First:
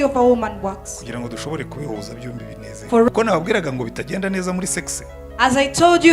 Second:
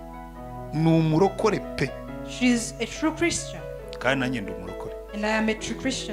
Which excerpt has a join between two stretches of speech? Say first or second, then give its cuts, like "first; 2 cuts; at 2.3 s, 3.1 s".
first; 1 cut; at 3.1 s